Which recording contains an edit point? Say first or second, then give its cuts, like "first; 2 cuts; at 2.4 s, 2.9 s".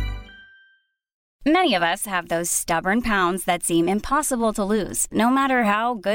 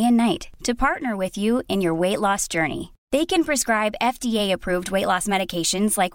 first; 1 cut; at 1.2 s